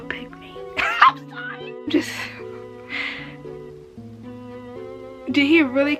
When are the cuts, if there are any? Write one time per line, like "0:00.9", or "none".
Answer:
0:01.9